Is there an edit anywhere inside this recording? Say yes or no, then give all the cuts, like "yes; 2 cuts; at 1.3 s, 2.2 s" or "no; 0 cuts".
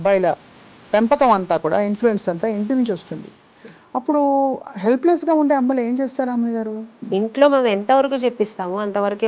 yes; 1 cut; at 7.0 s